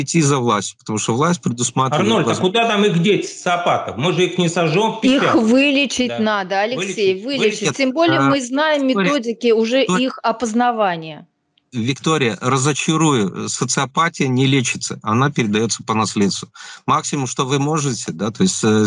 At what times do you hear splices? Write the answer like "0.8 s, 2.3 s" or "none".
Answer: none